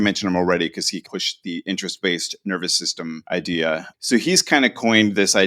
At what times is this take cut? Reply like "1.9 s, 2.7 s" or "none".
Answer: 1.0 s, 3.2 s, 3.9 s